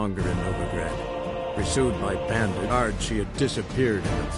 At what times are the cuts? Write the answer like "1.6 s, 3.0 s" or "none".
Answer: 2.7 s